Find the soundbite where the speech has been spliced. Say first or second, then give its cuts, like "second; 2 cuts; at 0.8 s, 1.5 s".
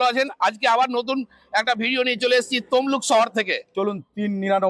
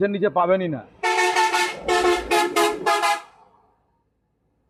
first; 1 cut; at 3.6 s